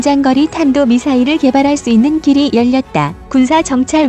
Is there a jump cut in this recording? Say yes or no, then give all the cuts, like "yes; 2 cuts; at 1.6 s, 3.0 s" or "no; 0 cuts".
yes; 1 cut; at 3.2 s